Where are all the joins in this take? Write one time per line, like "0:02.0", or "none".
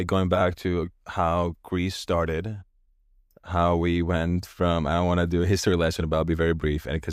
none